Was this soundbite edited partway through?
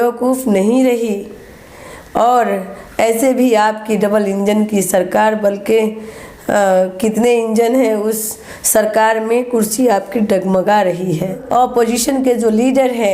yes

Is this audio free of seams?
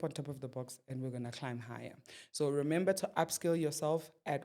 yes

